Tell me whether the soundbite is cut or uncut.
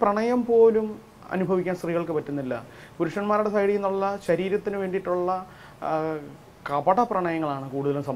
uncut